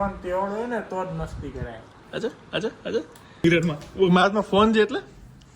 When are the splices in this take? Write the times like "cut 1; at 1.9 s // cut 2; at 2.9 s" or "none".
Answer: cut 1; at 2.0 s // cut 2; at 3.4 s